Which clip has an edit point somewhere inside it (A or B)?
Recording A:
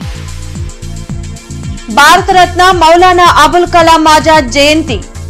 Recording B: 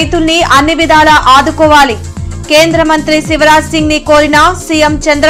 A